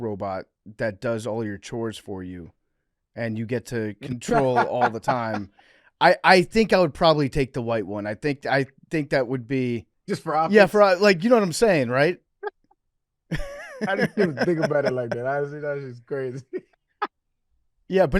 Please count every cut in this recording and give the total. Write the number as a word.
two